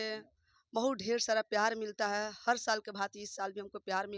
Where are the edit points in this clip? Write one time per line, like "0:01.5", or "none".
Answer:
none